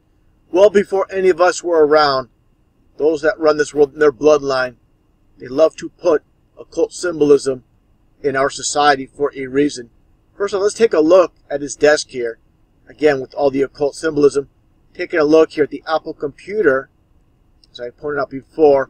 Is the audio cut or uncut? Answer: uncut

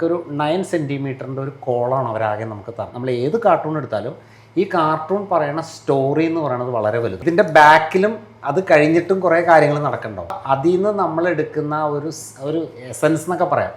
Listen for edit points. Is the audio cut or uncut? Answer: cut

